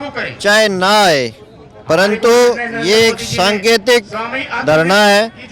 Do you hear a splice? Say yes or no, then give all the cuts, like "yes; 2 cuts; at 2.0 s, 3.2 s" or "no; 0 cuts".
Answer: no; 0 cuts